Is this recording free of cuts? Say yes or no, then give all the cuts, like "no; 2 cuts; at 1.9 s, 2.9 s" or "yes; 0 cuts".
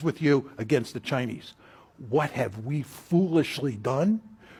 yes; 0 cuts